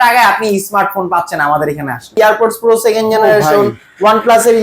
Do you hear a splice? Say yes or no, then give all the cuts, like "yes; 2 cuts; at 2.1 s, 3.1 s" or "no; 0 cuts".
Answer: yes; 1 cut; at 2.2 s